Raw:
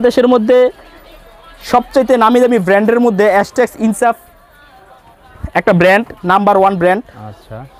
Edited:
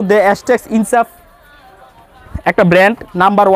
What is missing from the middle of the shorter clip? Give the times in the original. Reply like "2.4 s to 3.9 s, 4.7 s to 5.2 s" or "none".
none